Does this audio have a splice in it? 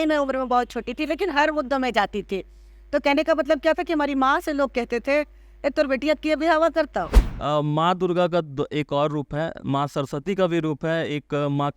yes; 1 cut; at 7.2 s

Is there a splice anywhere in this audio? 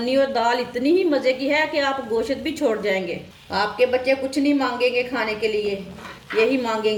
no; 0 cuts

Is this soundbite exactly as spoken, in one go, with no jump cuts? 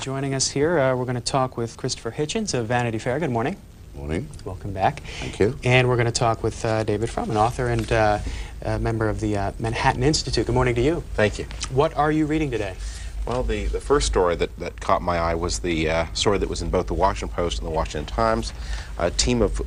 yes; 0 cuts

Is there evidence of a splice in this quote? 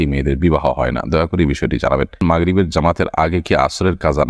yes; 1 cut; at 2.2 s

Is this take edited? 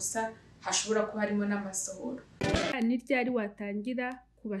yes; 1 cut; at 2.6 s

